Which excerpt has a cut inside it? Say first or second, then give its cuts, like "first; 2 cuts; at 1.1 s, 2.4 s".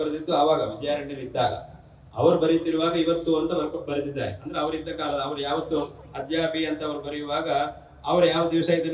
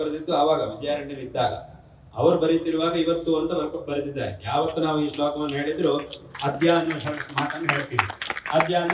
second; 1 cut; at 4.4 s